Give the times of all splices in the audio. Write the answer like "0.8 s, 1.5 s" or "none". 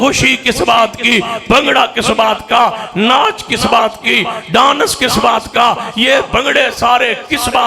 none